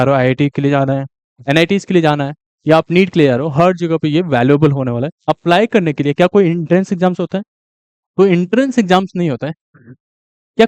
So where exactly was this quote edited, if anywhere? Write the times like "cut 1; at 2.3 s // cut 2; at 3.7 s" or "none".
cut 1; at 5.1 s